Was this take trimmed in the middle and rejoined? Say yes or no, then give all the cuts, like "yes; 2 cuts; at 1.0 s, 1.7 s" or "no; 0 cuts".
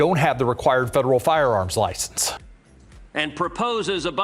no; 0 cuts